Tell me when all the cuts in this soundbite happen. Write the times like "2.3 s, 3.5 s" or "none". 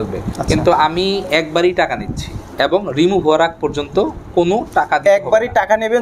none